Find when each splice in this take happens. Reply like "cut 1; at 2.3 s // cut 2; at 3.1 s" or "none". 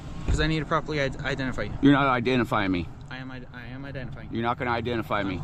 none